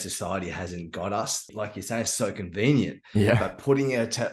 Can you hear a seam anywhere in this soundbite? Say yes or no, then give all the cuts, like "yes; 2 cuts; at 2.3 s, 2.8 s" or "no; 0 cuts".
yes; 1 cut; at 1.4 s